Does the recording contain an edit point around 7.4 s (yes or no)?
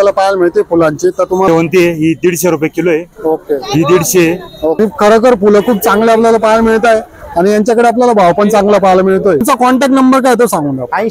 no